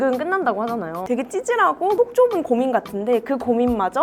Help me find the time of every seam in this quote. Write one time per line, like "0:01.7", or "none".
0:01.0